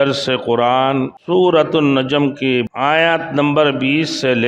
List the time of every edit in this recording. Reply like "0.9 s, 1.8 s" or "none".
1.2 s, 2.7 s